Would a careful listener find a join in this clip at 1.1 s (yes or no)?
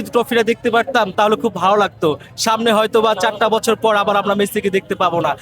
yes